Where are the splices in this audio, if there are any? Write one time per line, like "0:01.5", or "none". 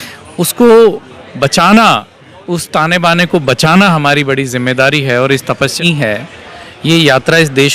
0:05.8